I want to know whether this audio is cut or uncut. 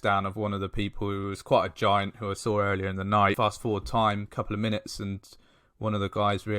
cut